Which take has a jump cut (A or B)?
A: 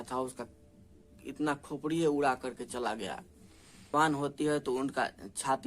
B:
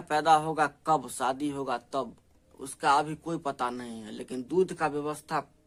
A